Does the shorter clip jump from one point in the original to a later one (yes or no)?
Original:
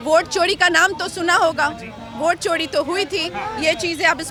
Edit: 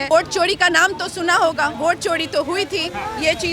yes